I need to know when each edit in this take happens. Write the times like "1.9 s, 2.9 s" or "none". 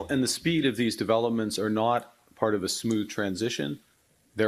none